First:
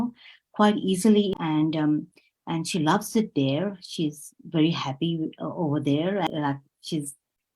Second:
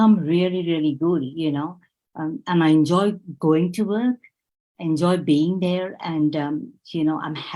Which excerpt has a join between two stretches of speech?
first; 2 cuts; at 1.3 s, 6.3 s

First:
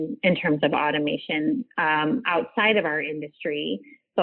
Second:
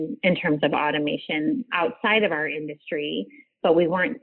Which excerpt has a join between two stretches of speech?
second; 1 cut; at 1.7 s

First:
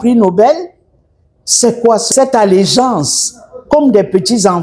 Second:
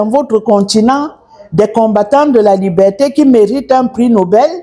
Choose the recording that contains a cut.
first; 1 cut; at 2.1 s

